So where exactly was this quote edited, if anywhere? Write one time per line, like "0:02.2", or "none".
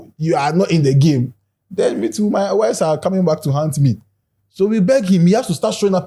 none